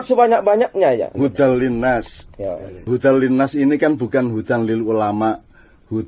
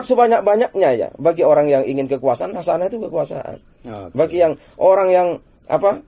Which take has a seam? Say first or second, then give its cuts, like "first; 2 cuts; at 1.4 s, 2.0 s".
first; 2 cuts; at 1.1 s, 2.9 s